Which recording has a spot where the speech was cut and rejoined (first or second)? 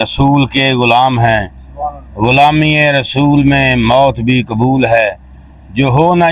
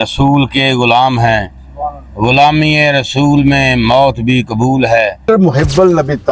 second